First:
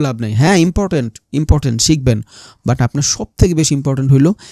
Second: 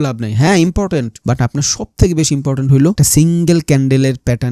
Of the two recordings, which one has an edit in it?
second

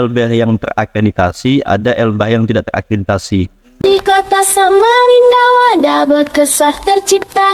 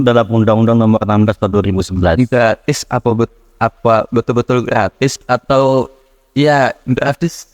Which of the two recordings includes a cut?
first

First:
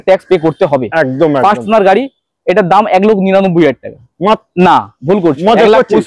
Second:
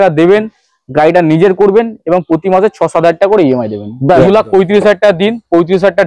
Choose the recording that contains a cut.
second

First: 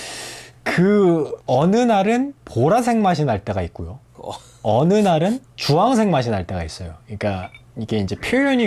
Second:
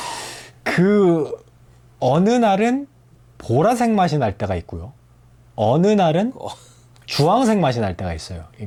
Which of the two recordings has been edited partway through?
first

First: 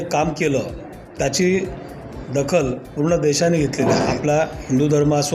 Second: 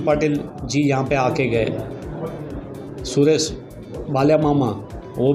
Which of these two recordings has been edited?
first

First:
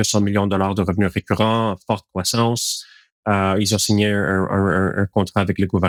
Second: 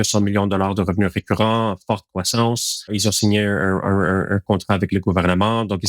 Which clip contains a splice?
second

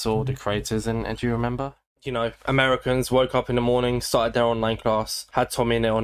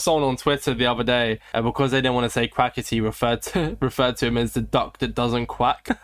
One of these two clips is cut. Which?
first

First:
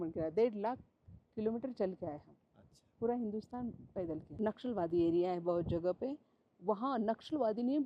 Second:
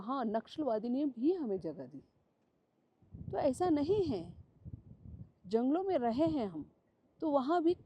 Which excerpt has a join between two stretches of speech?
first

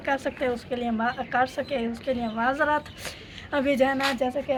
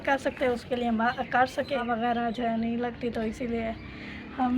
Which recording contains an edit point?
second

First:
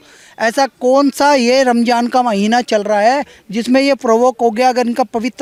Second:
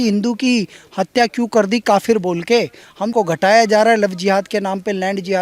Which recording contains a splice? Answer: second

